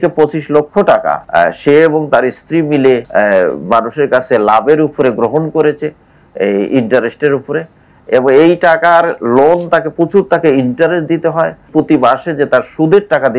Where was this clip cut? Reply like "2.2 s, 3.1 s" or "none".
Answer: 1.2 s, 3.1 s, 11.7 s